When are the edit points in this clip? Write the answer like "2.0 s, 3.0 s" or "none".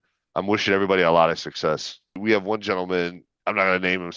2.2 s